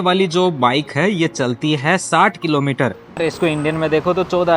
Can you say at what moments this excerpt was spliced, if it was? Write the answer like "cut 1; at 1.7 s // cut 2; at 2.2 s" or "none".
cut 1; at 3.2 s